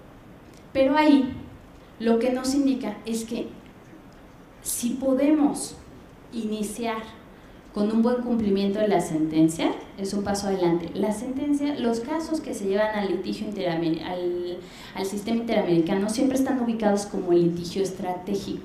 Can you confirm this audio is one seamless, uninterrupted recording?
no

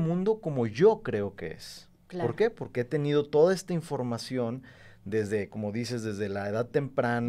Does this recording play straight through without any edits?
yes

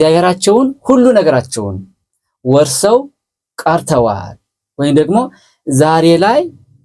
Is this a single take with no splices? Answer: yes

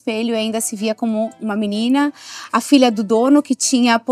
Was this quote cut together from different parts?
no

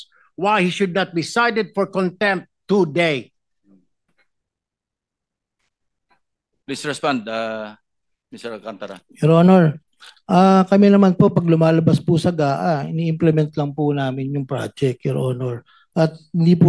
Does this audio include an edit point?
no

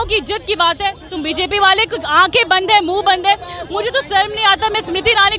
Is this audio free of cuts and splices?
yes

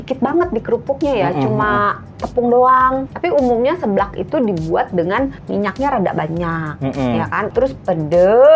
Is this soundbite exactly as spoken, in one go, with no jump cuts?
no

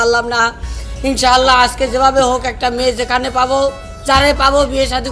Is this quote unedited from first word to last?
yes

